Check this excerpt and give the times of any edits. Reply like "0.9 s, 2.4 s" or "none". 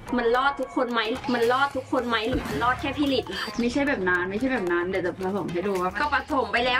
3.4 s